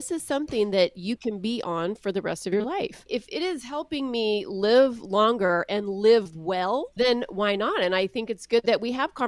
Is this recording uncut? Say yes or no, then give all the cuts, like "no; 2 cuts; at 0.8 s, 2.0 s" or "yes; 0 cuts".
no; 2 cuts; at 3.1 s, 6.9 s